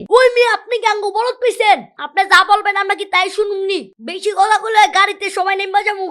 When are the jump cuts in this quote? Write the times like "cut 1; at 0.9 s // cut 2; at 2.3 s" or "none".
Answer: cut 1; at 3.9 s